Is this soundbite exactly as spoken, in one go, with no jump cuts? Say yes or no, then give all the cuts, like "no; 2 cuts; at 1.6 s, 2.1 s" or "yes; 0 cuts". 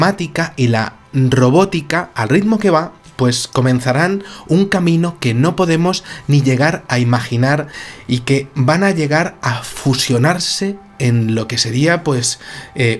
yes; 0 cuts